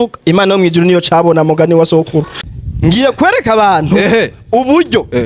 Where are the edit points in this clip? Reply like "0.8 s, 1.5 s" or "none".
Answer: 2.3 s